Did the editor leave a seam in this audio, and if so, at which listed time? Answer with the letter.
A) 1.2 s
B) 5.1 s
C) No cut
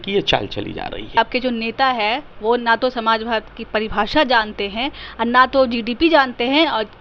A